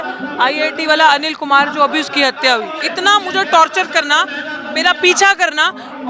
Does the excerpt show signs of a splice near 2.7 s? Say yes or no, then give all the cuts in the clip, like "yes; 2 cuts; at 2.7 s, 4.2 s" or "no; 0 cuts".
yes; 1 cut; at 2.7 s